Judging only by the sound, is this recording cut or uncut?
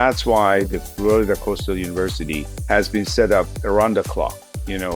cut